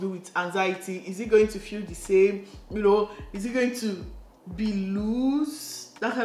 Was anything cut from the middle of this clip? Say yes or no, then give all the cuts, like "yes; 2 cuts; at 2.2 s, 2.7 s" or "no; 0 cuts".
no; 0 cuts